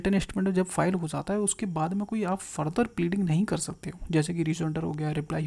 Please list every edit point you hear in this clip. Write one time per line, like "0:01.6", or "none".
none